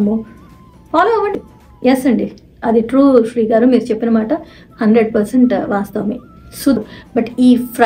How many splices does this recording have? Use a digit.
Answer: 2